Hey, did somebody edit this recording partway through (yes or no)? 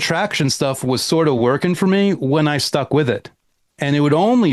no